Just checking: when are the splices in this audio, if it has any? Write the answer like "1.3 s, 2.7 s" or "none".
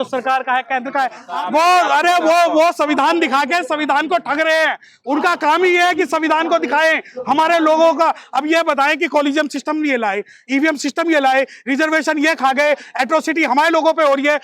1.2 s